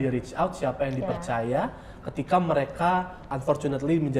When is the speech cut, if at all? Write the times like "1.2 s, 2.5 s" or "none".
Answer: 3.2 s